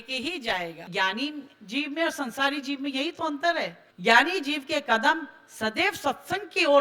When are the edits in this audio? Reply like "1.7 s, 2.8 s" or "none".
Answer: 0.9 s, 3.8 s